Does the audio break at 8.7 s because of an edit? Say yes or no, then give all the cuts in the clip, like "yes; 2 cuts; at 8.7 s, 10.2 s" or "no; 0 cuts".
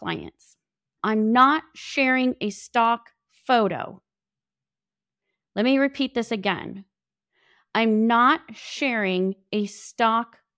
no; 1 cut; at 0.9 s